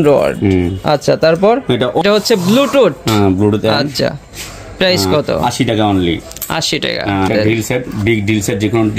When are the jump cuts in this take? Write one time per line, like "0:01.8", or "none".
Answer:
0:02.0
0:07.3